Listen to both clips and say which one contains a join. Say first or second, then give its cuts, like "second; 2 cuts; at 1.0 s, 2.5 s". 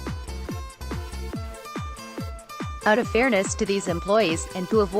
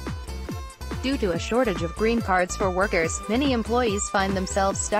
first; 2 cuts; at 0.9 s, 2.7 s